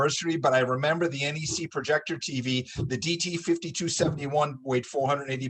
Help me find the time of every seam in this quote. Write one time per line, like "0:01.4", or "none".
none